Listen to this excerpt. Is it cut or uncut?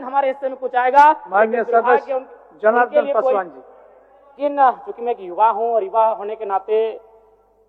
cut